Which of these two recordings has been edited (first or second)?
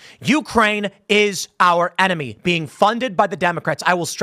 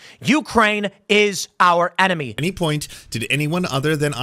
second